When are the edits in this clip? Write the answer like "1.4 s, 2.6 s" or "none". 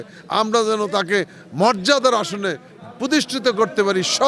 none